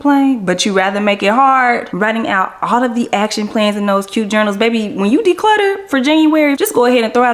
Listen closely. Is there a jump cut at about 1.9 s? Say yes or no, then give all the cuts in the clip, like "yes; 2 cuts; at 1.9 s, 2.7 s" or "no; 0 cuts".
yes; 2 cuts; at 1.9 s, 6.6 s